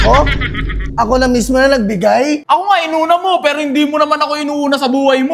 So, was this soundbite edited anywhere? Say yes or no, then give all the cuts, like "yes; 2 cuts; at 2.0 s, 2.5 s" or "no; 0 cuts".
yes; 1 cut; at 2.4 s